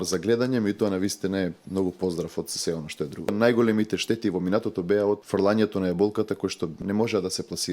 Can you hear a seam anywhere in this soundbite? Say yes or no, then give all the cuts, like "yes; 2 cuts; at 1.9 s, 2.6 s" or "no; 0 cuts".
yes; 3 cuts; at 3.3 s, 5.2 s, 6.8 s